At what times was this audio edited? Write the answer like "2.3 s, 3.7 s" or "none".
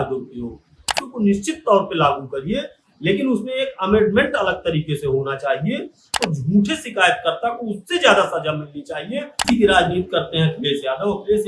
1.0 s, 6.3 s, 9.4 s